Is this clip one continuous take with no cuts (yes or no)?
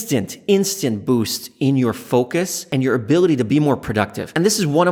yes